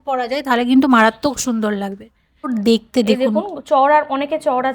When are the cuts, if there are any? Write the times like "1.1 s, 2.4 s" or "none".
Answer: 2.5 s